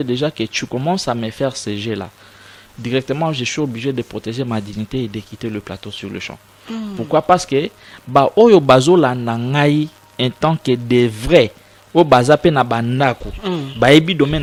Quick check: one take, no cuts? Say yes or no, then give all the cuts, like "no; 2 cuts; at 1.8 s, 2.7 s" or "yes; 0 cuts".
yes; 0 cuts